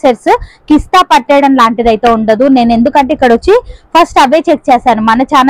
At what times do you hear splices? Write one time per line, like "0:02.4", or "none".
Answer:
none